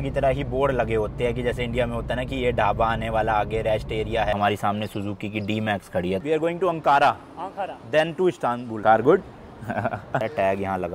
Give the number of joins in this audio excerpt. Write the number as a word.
four